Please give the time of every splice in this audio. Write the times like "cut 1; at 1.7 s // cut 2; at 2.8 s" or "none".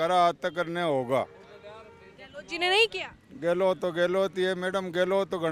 none